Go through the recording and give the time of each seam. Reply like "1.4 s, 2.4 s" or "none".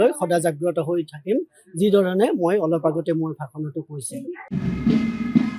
4.6 s

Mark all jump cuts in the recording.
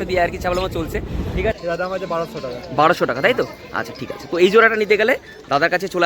1.6 s

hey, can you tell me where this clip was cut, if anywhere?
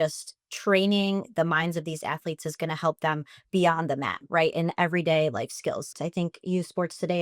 5.9 s

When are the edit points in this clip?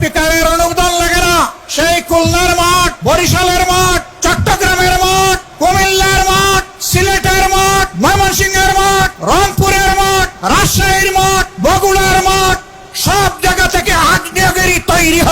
1.6 s, 3.0 s, 4.1 s, 5.5 s, 6.8 s, 7.9 s, 9.2 s, 10.3 s, 11.5 s

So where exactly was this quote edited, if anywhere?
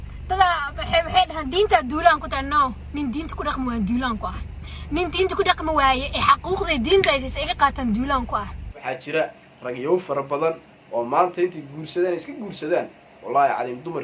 8.9 s

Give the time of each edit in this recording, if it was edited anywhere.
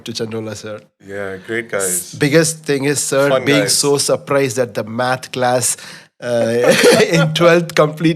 none

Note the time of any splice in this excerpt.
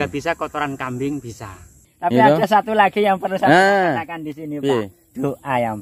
1.9 s

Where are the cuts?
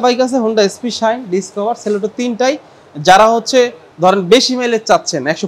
none

